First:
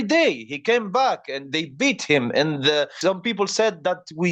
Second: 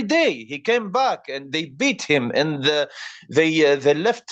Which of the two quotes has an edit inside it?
first; 1 cut; at 2.9 s

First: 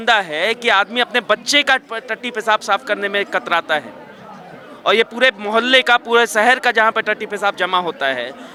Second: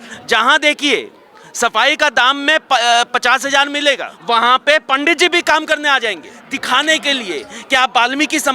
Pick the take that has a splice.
second; 2 cuts; at 4.1 s, 6.4 s

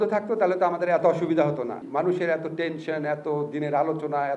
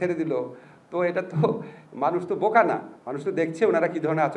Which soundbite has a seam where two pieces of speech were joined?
first; 1 cut; at 1.8 s

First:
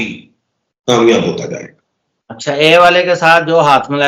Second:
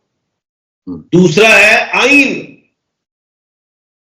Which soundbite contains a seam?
second; 1 cut; at 1.0 s

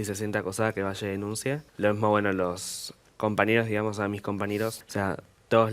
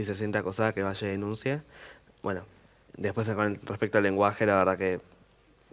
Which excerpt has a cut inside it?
first; 2 cuts; at 1.7 s, 4.8 s

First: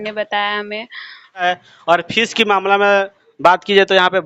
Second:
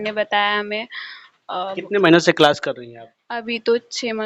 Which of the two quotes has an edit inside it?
first; 1 cut; at 1.4 s

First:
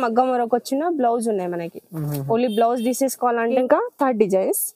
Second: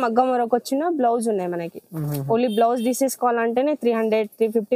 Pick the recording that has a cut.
first; 1 cut; at 3.6 s

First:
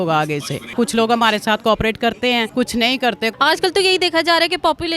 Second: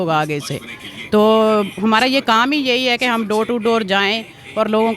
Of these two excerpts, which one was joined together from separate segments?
first; 3 cuts; at 0.7 s, 2.5 s, 3.3 s

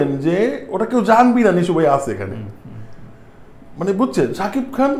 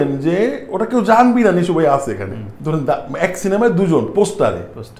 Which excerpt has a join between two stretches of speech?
second; 1 cut; at 2.5 s

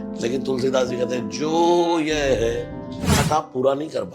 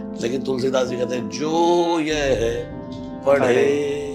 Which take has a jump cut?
first; 1 cut; at 3.2 s

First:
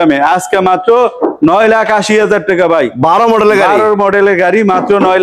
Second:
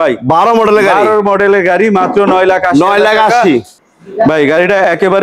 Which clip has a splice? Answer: second; 1 cut; at 3.7 s

